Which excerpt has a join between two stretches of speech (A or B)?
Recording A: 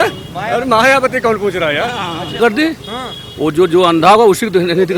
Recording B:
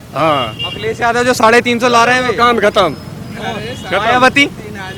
A